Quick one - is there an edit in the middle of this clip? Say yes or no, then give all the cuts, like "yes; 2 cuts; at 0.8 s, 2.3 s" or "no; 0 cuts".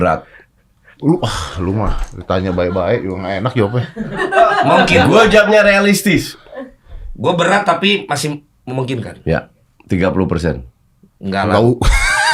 no; 0 cuts